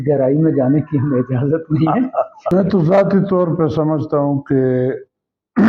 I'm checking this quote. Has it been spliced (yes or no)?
yes